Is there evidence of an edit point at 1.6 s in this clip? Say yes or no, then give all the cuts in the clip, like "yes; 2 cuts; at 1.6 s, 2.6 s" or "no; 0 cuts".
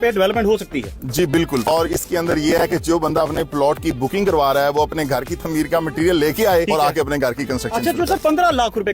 yes; 1 cut; at 1.6 s